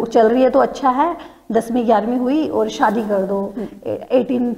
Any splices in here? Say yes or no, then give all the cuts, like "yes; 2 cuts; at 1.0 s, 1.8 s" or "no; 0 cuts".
no; 0 cuts